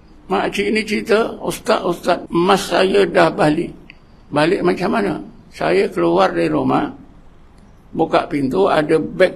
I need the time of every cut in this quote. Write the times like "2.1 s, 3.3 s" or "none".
2.2 s